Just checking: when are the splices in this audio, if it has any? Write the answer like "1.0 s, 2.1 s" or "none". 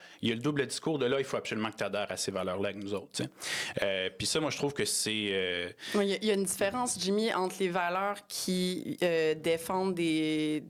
none